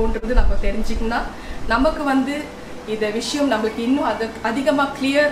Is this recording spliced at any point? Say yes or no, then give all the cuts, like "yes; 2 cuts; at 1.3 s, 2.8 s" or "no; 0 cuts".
no; 0 cuts